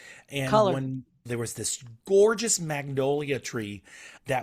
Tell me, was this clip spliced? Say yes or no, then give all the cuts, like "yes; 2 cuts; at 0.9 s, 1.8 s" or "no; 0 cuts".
yes; 1 cut; at 1.3 s